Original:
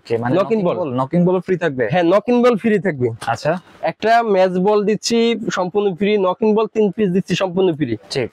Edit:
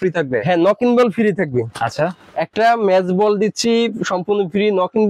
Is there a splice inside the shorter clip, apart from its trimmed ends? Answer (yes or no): no